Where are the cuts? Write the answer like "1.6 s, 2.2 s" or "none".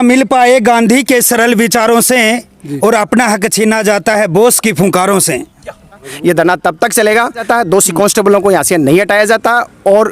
6.1 s, 7.5 s